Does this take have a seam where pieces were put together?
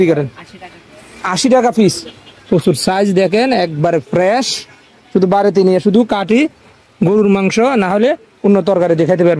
no; 0 cuts

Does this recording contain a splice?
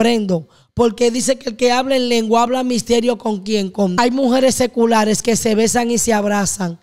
yes; 1 cut; at 3.9 s

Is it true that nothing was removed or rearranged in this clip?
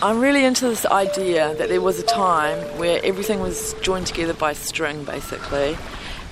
yes; 0 cuts

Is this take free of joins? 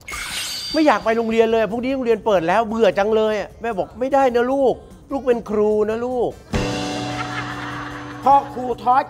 no; 1 cut; at 8.1 s

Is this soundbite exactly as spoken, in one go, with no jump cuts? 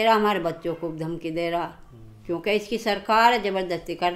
yes; 0 cuts

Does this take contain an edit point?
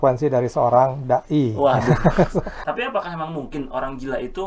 yes; 1 cut; at 2.6 s

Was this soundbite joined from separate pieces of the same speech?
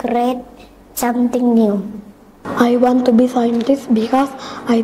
yes; 1 cut; at 2.4 s

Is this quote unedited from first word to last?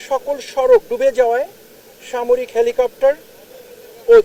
yes; 0 cuts

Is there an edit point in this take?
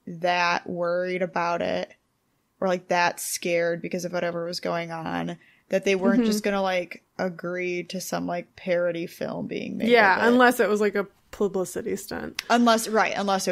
yes; 2 cuts; at 7.0 s, 8.5 s

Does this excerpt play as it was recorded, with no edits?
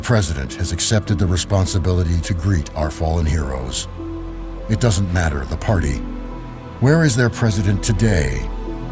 yes; 0 cuts

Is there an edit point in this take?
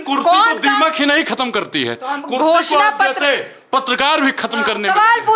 no; 0 cuts

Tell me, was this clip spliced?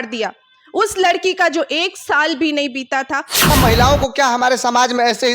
yes; 1 cut; at 3.5 s

